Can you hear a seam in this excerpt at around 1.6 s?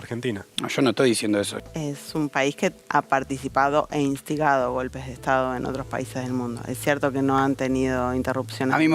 yes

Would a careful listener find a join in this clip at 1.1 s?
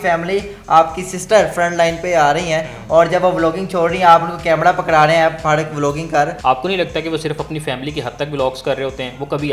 no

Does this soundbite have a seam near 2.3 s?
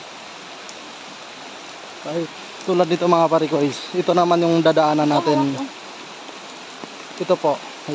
yes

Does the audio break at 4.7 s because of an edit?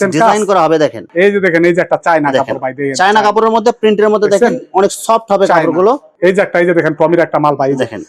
no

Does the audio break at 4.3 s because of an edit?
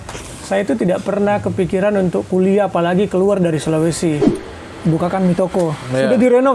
yes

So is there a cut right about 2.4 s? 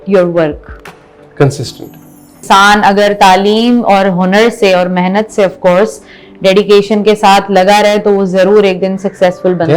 yes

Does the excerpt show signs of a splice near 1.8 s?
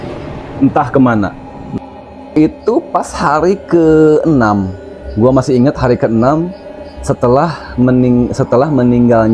yes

